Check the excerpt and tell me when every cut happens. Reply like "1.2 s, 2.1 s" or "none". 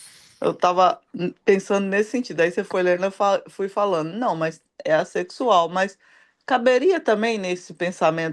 none